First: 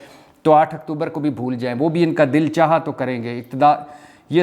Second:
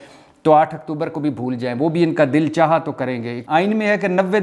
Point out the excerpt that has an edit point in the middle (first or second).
second